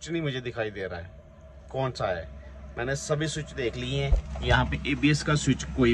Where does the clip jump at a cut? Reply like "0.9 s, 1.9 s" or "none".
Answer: none